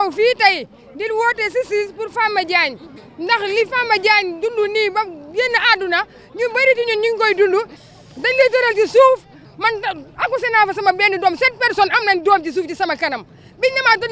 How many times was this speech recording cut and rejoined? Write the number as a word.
one